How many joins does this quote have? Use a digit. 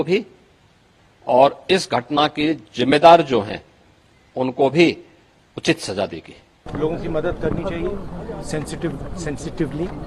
1